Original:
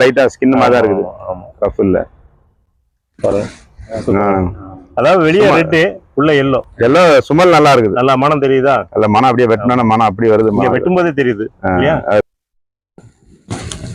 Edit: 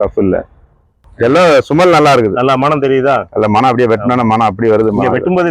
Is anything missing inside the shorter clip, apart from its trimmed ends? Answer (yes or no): yes